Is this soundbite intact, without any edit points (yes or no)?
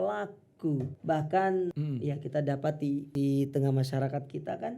no